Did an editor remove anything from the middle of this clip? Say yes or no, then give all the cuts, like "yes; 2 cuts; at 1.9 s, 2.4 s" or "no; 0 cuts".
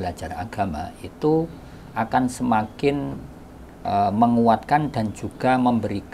no; 0 cuts